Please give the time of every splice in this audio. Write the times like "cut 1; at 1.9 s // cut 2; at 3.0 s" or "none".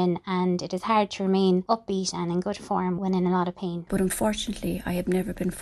cut 1; at 1.6 s // cut 2; at 3.0 s // cut 3; at 3.8 s